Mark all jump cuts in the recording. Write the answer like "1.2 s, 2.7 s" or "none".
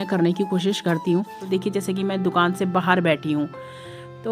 1.4 s